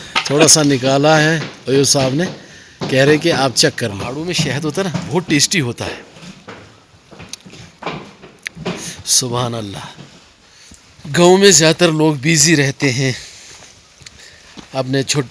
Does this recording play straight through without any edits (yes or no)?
yes